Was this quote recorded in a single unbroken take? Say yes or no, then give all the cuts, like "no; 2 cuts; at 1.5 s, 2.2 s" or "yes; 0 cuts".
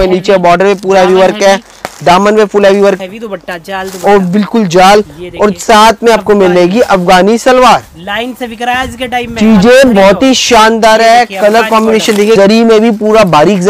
no; 2 cuts; at 3.0 s, 12.4 s